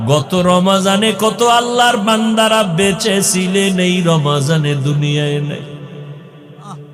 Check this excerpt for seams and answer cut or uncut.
uncut